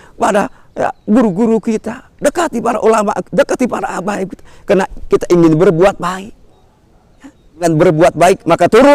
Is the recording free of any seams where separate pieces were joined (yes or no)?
no